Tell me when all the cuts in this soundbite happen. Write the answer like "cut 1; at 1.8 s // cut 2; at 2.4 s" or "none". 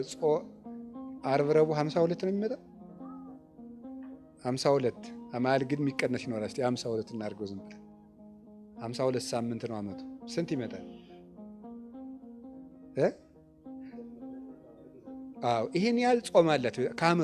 cut 1; at 10.8 s // cut 2; at 12.8 s